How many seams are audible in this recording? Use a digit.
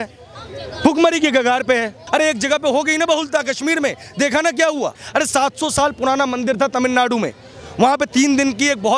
2